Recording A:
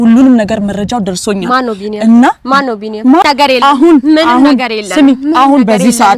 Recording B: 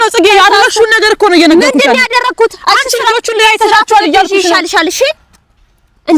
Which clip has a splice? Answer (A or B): A